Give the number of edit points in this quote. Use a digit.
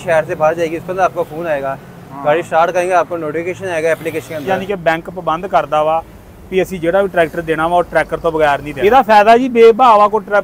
2